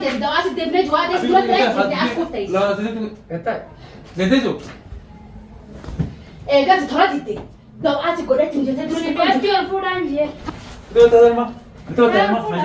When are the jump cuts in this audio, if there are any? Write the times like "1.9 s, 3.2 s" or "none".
10.4 s